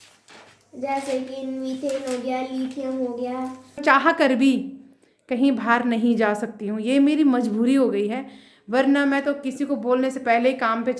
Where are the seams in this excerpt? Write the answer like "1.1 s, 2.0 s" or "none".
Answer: 3.8 s